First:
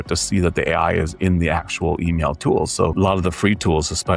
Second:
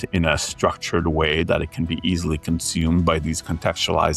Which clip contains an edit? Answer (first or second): first